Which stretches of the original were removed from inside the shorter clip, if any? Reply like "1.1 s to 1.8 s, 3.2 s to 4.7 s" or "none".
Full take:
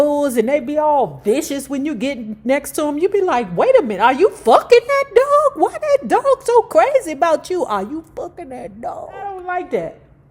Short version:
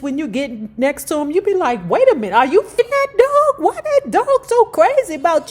4.5 s to 4.8 s